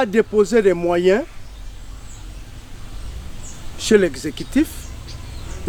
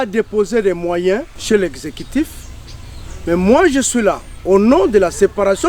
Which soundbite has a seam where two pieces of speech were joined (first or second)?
second